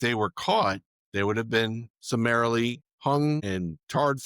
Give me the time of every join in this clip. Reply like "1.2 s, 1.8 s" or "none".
0.9 s, 1.9 s, 2.9 s, 3.4 s